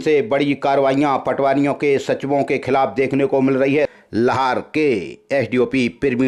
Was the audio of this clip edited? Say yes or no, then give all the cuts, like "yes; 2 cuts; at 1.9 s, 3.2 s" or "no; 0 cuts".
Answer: yes; 1 cut; at 3.9 s